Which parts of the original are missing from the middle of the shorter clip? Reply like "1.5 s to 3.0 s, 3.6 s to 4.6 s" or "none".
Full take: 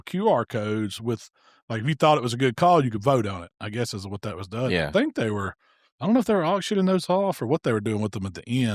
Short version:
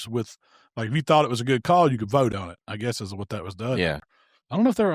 4.9 s to 5.5 s